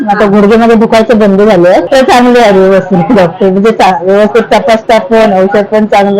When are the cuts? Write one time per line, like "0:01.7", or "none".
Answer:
0:01.9